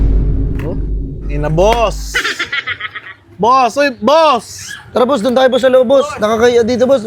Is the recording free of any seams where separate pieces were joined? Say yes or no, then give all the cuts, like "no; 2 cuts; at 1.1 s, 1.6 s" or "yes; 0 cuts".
yes; 0 cuts